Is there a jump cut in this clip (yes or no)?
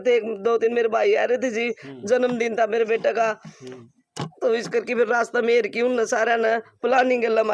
no